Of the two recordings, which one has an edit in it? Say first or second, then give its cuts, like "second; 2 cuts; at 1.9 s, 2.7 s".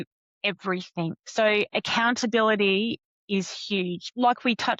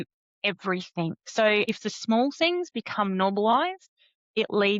second; 1 cut; at 1.7 s